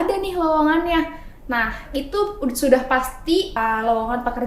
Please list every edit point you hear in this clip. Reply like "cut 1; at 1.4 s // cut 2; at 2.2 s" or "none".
cut 1; at 3.5 s